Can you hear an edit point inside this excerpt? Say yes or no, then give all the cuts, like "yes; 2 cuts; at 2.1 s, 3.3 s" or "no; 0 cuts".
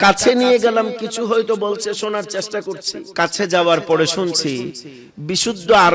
yes; 1 cut; at 3.0 s